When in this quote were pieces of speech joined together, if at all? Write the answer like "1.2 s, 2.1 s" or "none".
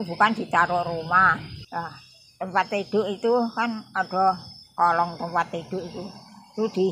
1.5 s